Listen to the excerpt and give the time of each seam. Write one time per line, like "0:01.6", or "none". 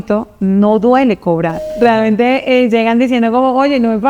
0:01.6